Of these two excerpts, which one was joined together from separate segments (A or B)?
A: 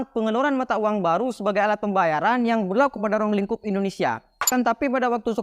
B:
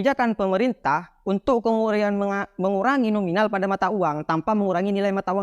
A